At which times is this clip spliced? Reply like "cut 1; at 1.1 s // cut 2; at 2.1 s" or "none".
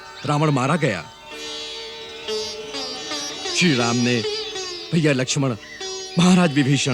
none